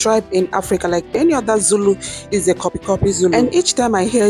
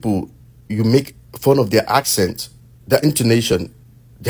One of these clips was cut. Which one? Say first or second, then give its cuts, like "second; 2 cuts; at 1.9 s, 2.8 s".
first; 1 cut; at 1.1 s